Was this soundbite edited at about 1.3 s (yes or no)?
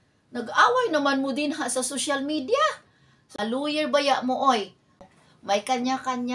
no